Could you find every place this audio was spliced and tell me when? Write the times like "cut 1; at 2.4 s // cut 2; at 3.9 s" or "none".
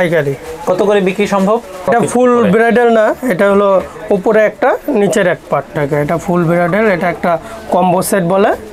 cut 1; at 1.9 s // cut 2; at 5.7 s